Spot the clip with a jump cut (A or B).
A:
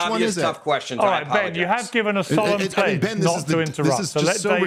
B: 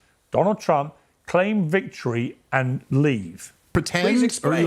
B